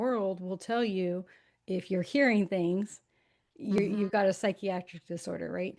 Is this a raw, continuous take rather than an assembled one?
yes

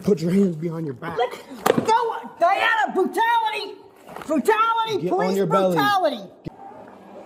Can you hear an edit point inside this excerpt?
yes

